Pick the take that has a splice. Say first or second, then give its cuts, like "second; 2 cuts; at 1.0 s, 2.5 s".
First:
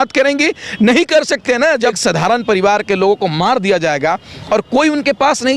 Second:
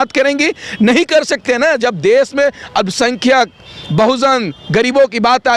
first; 1 cut; at 2.0 s